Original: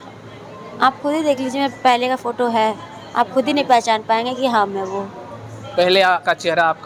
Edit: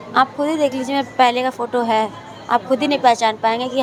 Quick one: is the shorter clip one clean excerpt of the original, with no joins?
yes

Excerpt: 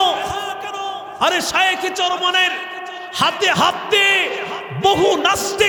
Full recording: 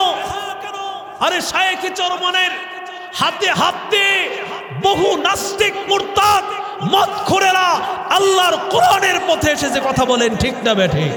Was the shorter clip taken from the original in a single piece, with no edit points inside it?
yes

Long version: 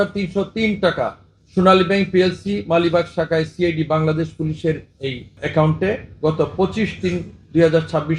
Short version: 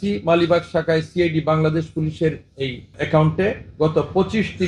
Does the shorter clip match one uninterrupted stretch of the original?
yes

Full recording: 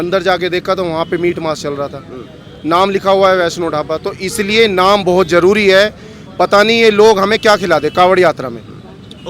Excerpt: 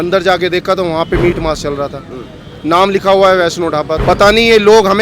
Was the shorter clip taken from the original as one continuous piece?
no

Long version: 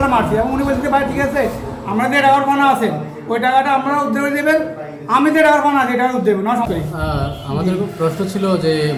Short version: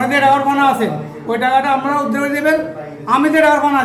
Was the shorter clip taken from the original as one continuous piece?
yes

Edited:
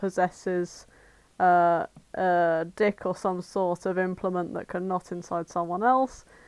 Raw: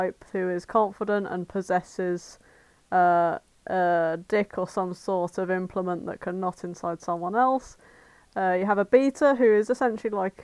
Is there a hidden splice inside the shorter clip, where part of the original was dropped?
no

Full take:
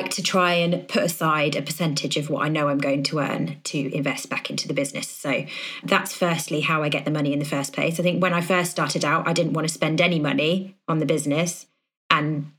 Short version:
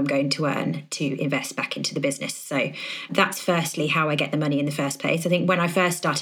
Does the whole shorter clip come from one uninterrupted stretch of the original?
yes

